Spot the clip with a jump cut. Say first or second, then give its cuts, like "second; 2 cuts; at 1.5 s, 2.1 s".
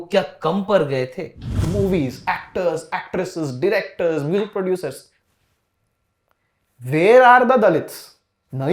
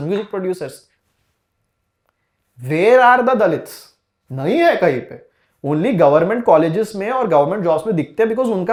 first; 1 cut; at 1.6 s